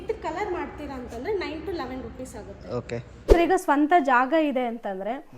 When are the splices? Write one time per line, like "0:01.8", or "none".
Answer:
0:03.3